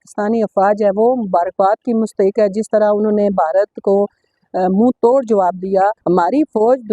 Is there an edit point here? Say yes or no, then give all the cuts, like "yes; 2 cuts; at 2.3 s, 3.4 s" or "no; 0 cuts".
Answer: yes; 1 cut; at 6.0 s